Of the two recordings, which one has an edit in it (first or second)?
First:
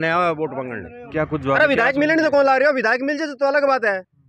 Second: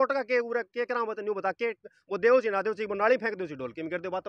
first